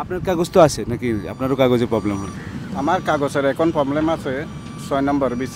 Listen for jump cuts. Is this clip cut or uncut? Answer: uncut